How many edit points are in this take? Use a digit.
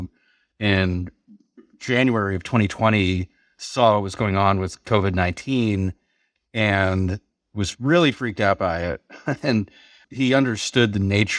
1